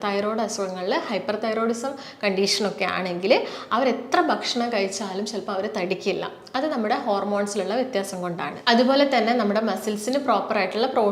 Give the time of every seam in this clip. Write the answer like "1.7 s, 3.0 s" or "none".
none